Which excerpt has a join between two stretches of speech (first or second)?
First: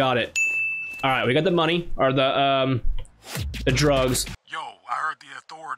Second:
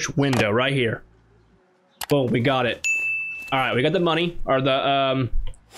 first